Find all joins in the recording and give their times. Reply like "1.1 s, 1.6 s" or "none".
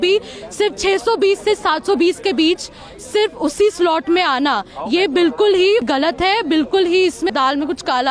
5.9 s, 7.3 s